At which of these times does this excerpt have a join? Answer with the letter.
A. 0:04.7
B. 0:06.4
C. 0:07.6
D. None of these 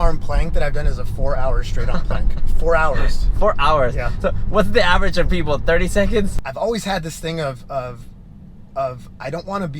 B